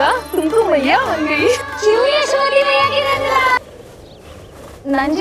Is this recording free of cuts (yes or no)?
no